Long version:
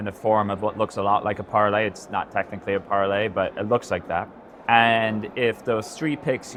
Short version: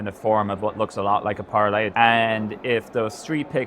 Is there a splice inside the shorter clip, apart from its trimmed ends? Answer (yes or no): yes